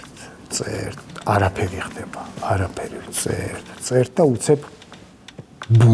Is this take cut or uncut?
uncut